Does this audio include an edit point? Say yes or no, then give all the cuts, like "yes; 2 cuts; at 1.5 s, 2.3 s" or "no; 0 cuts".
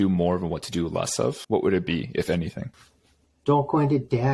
no; 0 cuts